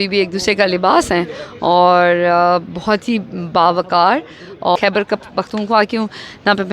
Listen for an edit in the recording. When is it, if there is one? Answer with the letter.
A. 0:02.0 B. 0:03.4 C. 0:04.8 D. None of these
C